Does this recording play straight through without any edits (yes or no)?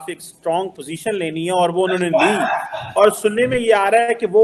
yes